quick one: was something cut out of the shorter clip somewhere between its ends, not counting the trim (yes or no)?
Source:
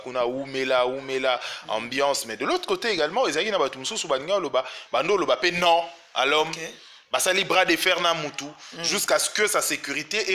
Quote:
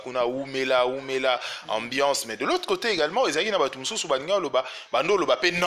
no